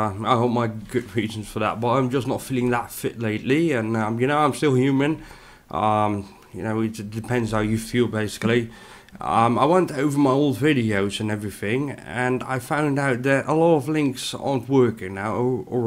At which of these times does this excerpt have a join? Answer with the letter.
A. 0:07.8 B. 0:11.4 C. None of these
C